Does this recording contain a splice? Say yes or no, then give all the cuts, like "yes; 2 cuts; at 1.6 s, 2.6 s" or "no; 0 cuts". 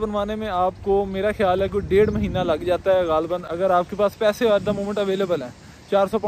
no; 0 cuts